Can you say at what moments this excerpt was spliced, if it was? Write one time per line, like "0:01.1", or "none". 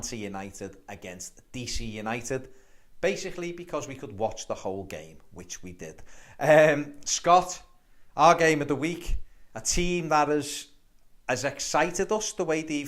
0:03.3